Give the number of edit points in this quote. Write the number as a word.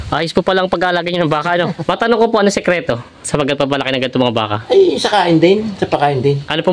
one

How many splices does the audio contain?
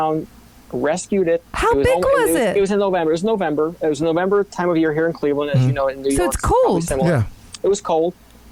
zero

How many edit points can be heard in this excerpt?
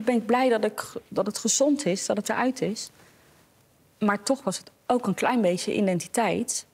zero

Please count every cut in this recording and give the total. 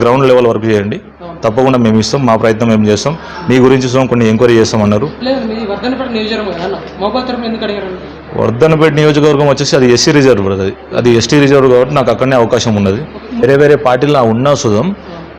one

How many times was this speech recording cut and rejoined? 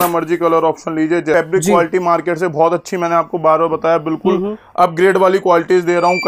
one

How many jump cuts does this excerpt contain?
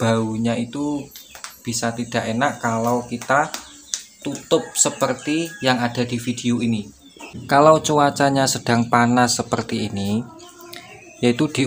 one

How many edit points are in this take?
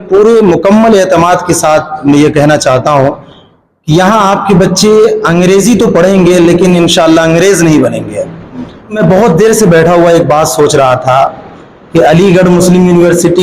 one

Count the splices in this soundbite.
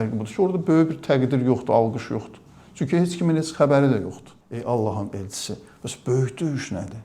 one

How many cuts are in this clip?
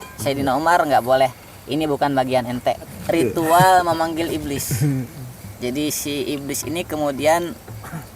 one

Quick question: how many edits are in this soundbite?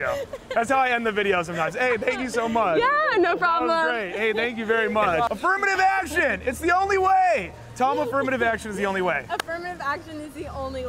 one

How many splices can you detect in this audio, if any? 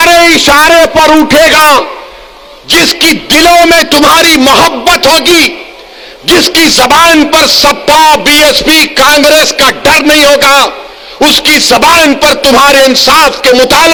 zero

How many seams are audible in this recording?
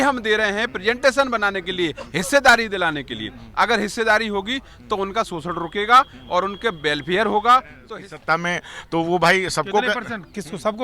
one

